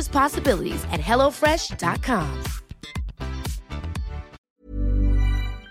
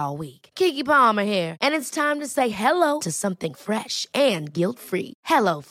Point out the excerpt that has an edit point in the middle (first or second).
first